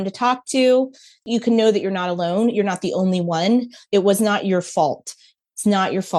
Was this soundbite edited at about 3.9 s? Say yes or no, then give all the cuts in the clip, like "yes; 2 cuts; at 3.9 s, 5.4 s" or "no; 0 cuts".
no; 2 cuts; at 1.2 s, 5.3 s